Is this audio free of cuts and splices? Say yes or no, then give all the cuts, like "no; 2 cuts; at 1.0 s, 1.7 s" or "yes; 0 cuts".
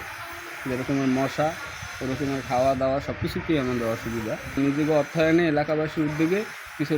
no; 1 cut; at 4.5 s